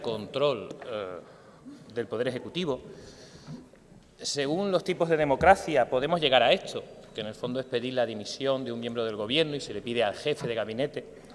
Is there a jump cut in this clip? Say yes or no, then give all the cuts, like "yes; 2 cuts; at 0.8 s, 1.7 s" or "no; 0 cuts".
yes; 1 cut; at 5.6 s